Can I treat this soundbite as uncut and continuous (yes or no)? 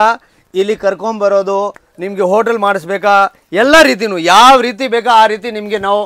yes